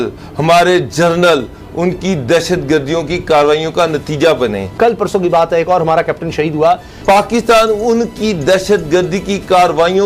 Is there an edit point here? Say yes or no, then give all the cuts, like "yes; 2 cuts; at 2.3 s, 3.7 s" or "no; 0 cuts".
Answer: yes; 2 cuts; at 4.7 s, 6.9 s